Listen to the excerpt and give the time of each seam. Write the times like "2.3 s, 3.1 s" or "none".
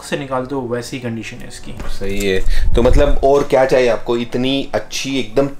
none